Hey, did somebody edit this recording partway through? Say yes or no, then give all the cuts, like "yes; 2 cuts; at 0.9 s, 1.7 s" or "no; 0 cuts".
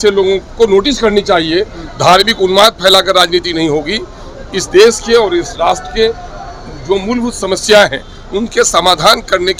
no; 0 cuts